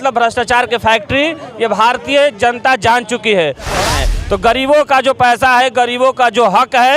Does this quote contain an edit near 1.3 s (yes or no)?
no